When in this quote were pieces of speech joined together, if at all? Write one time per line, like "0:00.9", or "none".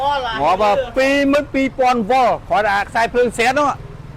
0:01.3